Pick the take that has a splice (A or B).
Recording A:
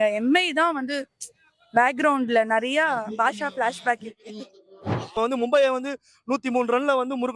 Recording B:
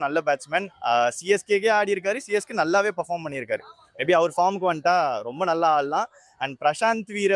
A